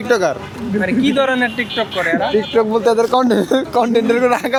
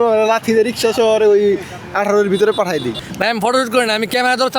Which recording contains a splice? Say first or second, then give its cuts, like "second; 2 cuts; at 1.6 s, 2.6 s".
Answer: second; 1 cut; at 3.0 s